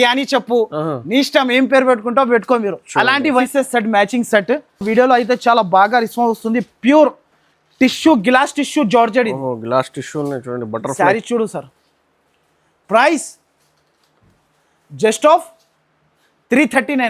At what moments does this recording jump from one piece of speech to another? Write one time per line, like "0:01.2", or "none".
0:03.4